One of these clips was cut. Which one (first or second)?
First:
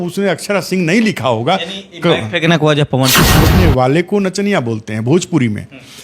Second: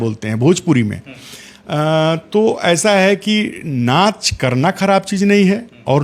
first